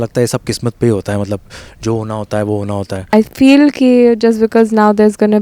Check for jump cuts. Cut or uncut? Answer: cut